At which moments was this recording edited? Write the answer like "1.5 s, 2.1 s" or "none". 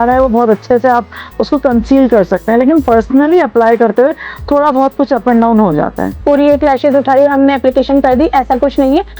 6.1 s